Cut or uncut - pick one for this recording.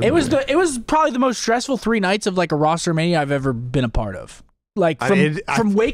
uncut